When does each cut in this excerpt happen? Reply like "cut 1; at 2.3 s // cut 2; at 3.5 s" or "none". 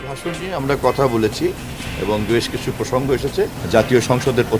cut 1; at 3.6 s